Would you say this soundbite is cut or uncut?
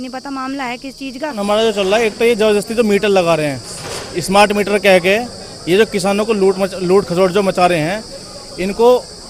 cut